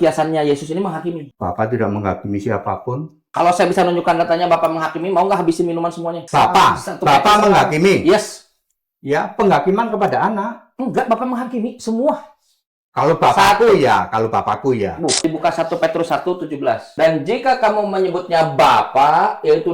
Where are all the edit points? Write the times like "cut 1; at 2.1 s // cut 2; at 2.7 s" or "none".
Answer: cut 1; at 1.3 s // cut 2; at 3.1 s // cut 3; at 6.2 s // cut 4; at 15.2 s // cut 5; at 16.9 s